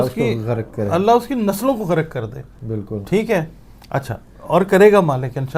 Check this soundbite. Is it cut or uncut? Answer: uncut